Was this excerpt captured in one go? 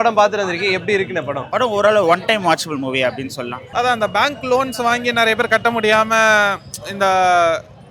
no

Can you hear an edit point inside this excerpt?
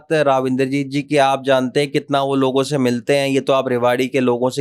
no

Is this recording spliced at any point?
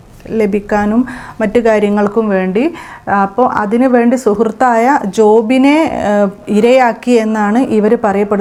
no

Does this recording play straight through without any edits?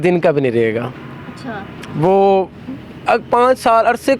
yes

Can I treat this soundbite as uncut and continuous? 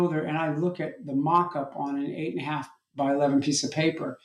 yes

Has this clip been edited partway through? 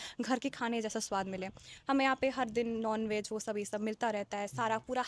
no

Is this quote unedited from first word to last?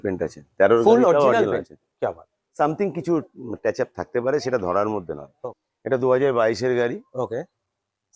no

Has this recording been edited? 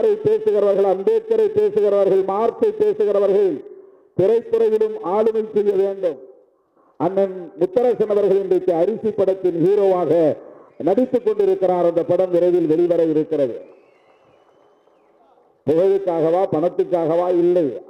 no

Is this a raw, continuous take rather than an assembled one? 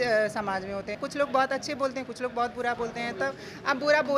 no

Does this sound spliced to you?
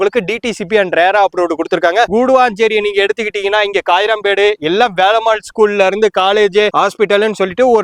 yes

